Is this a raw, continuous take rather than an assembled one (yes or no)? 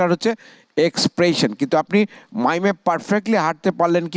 yes